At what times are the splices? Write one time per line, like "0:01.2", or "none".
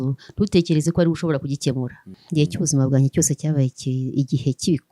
0:02.2